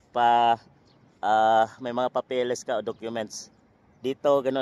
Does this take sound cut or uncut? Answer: uncut